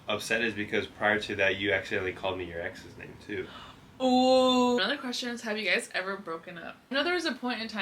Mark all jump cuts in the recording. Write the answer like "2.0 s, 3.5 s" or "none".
4.8 s, 6.9 s